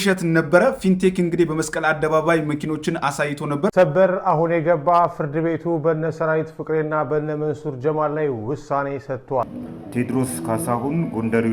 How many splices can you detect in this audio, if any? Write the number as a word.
two